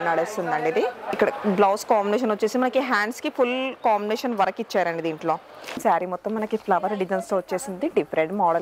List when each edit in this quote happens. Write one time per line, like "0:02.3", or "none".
0:01.1
0:05.8